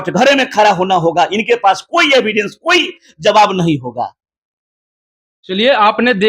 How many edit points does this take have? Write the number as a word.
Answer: zero